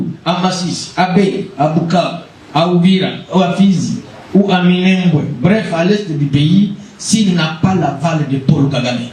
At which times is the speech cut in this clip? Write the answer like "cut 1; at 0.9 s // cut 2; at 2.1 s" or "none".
none

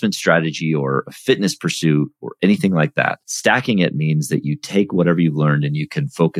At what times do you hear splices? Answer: cut 1; at 3.3 s

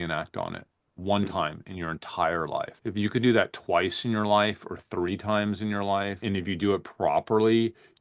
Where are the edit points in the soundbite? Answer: cut 1; at 2.7 s // cut 2; at 6.2 s

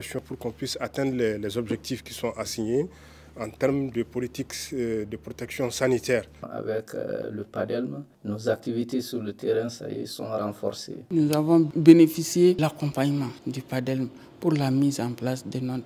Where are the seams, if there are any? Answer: cut 1; at 6.4 s // cut 2; at 11.0 s

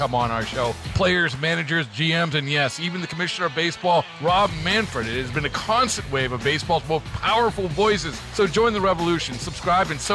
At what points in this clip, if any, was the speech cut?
none

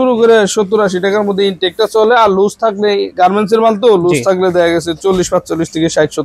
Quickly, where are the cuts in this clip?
none

